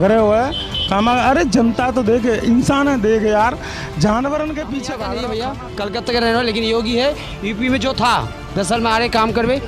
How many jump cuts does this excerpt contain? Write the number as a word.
one